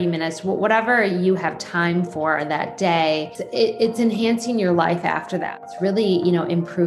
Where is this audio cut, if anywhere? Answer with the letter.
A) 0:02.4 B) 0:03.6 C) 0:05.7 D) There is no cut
C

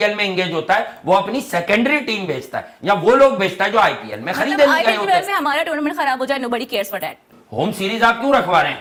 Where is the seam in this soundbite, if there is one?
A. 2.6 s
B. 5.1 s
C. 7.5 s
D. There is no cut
D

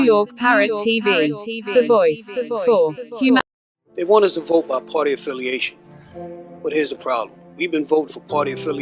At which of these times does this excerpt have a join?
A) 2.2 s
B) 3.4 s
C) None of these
B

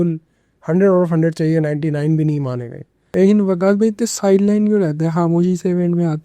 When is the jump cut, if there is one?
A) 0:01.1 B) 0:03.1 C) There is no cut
B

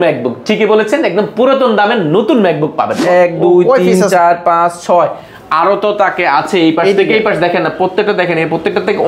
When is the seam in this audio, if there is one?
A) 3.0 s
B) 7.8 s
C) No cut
A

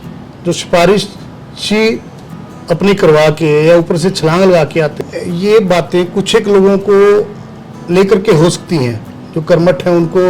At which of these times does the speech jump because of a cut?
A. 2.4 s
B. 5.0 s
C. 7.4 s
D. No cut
B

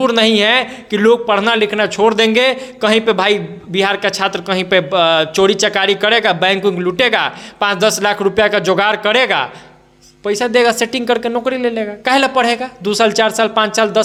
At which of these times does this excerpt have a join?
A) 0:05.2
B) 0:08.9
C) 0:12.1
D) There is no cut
D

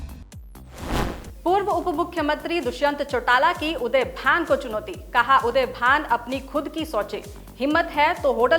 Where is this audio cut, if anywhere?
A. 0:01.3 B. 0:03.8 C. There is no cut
A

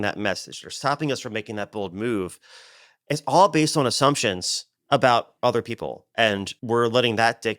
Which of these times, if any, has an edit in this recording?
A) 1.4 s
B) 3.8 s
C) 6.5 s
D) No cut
C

